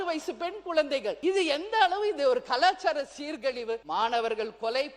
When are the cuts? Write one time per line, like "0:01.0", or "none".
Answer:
0:01.2
0:03.8